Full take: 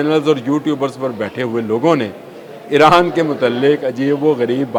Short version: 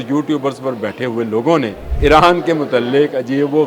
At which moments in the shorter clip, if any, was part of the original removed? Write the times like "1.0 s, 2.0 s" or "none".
1.8 s